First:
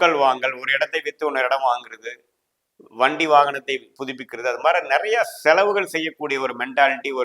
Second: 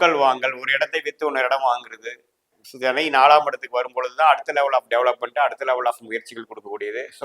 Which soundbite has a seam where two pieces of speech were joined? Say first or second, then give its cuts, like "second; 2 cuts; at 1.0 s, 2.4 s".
second; 1 cut; at 2.6 s